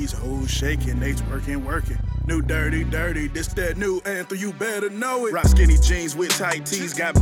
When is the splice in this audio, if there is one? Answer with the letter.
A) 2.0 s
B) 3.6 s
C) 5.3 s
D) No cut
C